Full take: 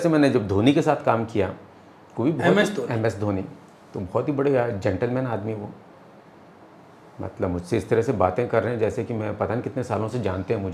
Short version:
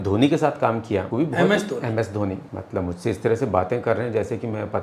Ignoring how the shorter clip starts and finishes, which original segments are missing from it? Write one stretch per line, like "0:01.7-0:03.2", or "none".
0:01.5-0:02.1
0:03.6-0:07.2

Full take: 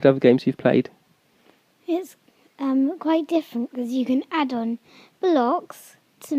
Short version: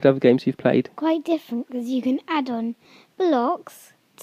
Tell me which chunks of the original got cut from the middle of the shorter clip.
0:00.9-0:03.0

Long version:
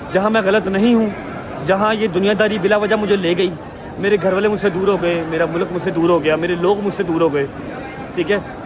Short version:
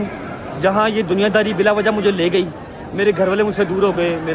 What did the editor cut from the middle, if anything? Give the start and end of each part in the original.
none

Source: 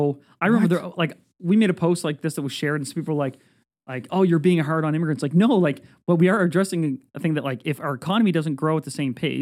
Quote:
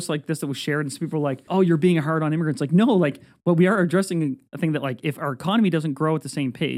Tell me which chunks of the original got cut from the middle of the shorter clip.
0:03.4-0:04.0

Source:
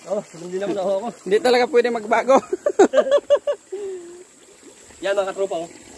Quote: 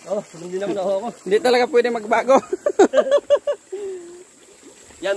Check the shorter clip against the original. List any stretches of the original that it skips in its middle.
none

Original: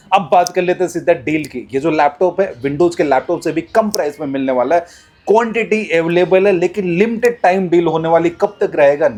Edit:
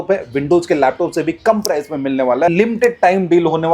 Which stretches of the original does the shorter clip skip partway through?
0:04.8-0:06.9

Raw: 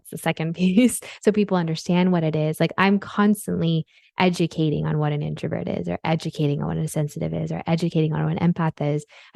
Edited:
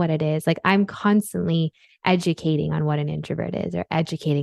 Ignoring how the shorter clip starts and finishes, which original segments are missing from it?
none

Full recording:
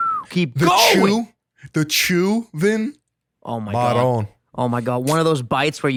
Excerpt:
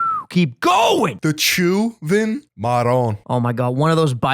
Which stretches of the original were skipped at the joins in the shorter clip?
0:01.1-0:01.6
0:03.0-0:03.6
0:04.3-0:04.5

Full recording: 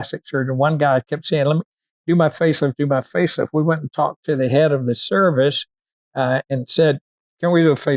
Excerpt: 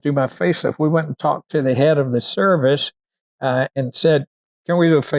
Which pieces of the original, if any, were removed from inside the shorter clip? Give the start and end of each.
none

